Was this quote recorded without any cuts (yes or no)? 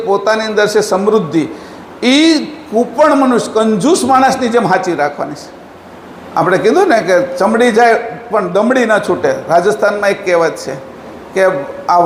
yes